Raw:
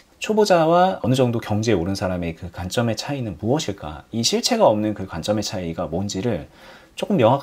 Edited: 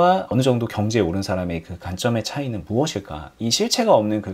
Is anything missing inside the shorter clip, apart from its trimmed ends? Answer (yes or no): no